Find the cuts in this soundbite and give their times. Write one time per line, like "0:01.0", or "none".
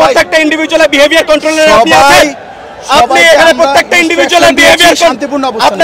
none